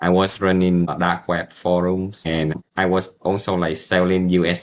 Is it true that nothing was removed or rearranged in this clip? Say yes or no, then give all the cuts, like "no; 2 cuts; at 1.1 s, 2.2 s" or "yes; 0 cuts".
no; 2 cuts; at 0.9 s, 2.5 s